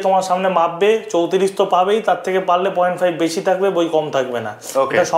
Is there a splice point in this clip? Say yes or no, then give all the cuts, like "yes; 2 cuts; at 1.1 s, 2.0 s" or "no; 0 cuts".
no; 0 cuts